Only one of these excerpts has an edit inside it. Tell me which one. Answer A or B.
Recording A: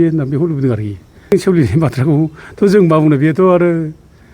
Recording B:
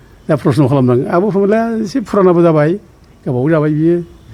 A